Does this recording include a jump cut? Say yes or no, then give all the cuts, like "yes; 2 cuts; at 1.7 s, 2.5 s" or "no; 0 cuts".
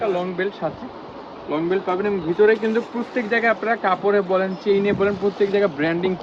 no; 0 cuts